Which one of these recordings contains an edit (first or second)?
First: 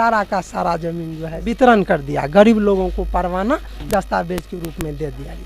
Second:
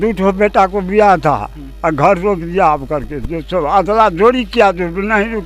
first